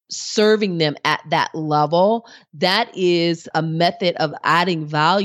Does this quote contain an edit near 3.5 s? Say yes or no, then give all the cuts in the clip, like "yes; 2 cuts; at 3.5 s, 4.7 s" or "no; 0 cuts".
yes; 2 cuts; at 3.5 s, 4.4 s